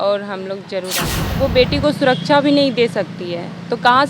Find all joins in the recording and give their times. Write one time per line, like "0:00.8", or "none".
0:01.2